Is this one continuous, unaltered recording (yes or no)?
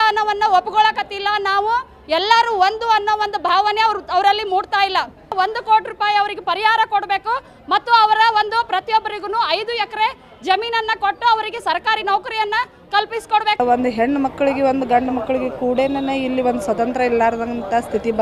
no